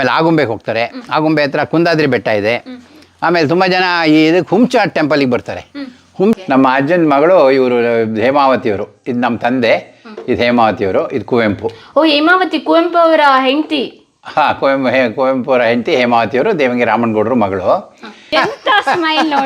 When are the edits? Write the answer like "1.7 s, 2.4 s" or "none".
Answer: 6.4 s, 18.3 s